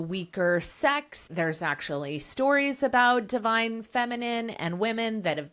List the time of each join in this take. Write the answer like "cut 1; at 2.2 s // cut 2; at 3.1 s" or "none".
cut 1; at 1.3 s